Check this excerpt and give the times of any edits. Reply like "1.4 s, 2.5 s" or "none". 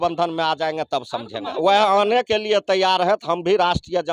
1.5 s